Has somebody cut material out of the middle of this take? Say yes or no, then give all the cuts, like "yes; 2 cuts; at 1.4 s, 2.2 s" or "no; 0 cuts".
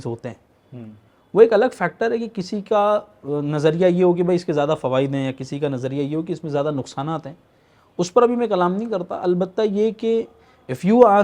no; 0 cuts